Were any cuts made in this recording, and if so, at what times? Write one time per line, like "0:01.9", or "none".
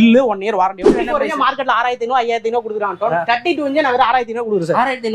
0:00.9